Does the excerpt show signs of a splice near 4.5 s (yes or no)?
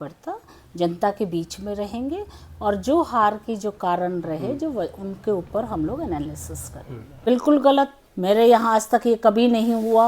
no